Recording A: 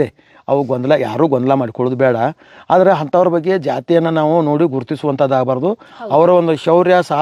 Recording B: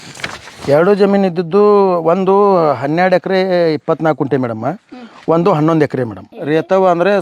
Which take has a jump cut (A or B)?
B